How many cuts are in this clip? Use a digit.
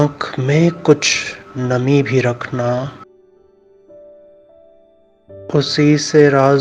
2